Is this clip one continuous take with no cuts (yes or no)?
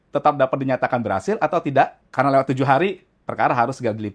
no